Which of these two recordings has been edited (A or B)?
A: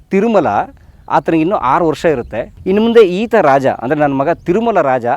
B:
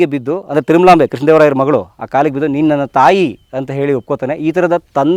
A